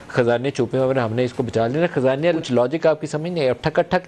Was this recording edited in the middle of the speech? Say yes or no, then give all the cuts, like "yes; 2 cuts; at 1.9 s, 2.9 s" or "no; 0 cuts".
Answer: yes; 1 cut; at 2.4 s